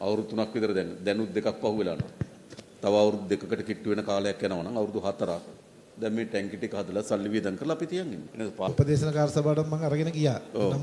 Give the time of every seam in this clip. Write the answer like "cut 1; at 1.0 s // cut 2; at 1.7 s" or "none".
cut 1; at 8.7 s